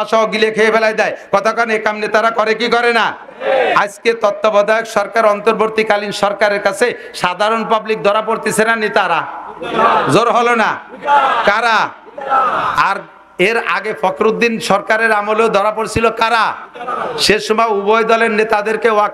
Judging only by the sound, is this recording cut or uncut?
uncut